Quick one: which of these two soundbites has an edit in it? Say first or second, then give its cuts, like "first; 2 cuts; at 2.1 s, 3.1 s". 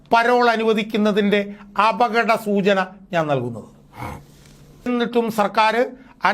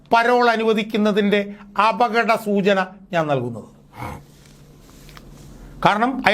first; 1 cut; at 4.9 s